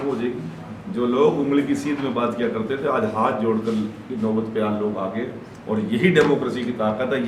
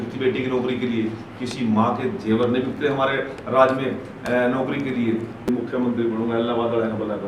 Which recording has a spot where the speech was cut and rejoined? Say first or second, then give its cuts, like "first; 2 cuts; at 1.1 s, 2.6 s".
second; 1 cut; at 5.5 s